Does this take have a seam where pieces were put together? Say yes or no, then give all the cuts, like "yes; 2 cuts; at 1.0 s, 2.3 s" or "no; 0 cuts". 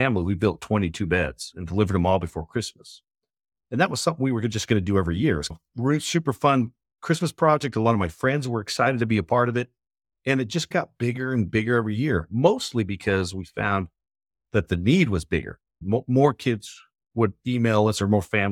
no; 0 cuts